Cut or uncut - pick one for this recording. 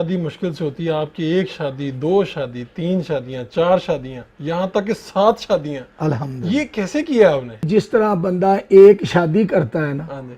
uncut